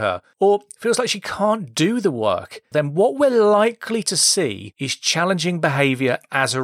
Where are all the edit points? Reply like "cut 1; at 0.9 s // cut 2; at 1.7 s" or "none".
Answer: cut 1; at 2.7 s